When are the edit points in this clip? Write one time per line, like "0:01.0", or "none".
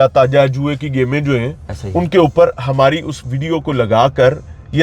none